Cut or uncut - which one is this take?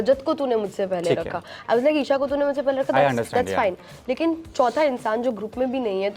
uncut